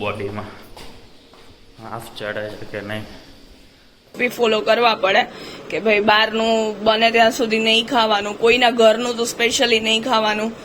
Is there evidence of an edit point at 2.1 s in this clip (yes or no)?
no